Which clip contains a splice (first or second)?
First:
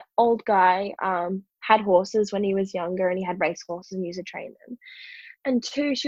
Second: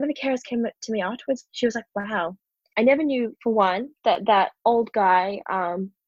second